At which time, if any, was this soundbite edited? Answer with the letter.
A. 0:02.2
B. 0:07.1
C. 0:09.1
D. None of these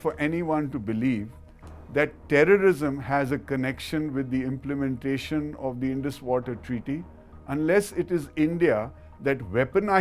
D